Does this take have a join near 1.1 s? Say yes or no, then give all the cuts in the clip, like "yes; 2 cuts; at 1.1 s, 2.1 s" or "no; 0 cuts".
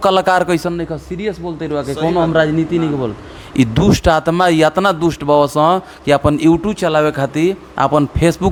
no; 0 cuts